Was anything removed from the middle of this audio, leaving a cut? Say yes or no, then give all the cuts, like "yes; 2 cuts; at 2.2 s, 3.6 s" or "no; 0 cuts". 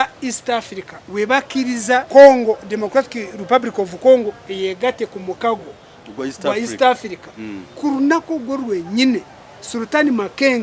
yes; 1 cut; at 2.1 s